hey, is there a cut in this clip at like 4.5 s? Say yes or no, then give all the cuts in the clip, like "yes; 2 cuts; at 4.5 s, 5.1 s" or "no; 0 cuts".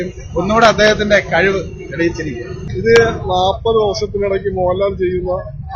no; 1 cut; at 2.6 s